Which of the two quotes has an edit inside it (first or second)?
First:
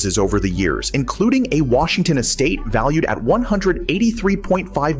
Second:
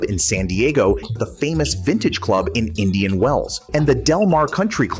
second